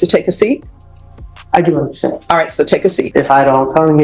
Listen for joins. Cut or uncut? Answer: cut